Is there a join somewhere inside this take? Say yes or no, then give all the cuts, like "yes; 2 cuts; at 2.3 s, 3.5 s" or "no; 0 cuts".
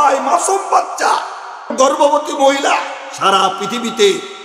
no; 0 cuts